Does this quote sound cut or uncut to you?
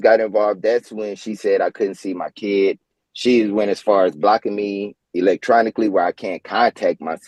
uncut